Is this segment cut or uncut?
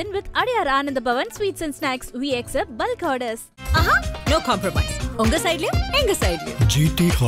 uncut